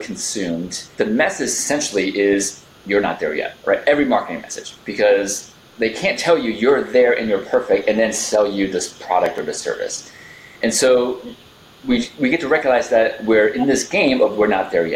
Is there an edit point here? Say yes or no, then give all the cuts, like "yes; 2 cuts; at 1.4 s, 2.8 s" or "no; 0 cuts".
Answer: yes; 2 cuts; at 0.9 s, 3.5 s